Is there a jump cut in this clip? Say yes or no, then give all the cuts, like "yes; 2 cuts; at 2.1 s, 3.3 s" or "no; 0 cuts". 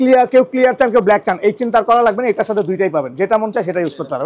no; 0 cuts